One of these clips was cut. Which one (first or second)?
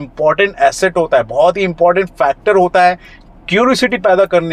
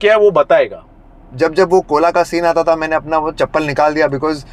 second